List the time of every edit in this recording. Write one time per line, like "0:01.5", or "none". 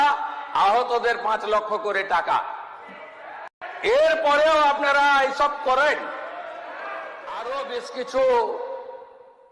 0:07.5